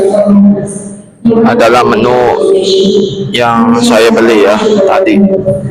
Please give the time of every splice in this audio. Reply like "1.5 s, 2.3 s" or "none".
none

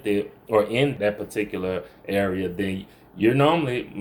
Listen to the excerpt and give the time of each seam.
0.9 s

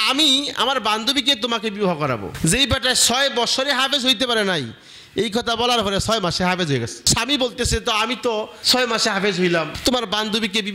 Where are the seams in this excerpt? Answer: 7.1 s, 8.6 s, 9.7 s

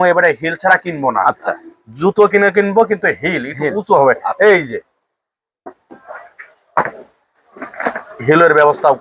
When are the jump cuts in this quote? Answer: none

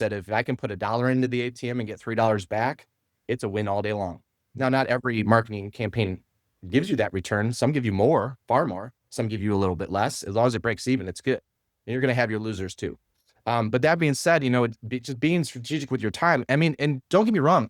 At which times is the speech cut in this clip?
none

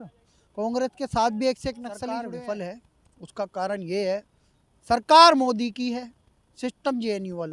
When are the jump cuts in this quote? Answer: 2.0 s

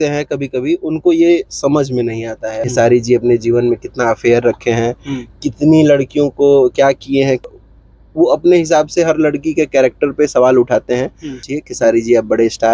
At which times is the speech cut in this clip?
2.6 s, 7.4 s, 11.5 s

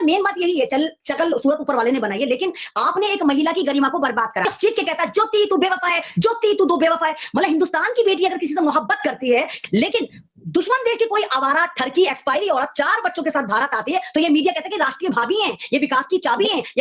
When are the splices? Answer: 4.5 s, 9.5 s

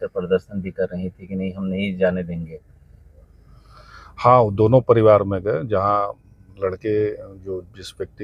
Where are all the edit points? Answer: none

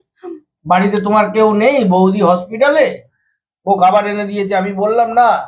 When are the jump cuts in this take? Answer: none

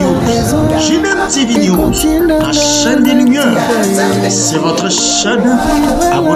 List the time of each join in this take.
none

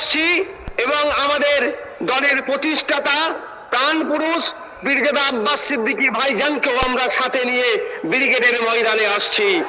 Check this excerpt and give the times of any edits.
none

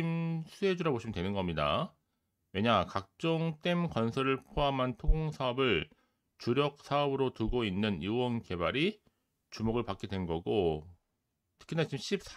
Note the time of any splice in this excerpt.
none

